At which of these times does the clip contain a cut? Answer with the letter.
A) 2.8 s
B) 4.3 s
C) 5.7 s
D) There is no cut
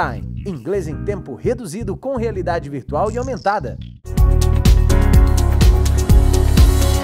B